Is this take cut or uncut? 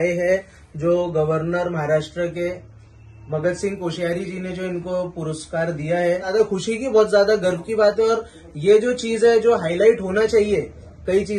cut